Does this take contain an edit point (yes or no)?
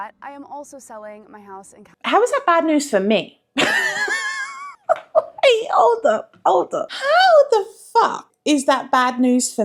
no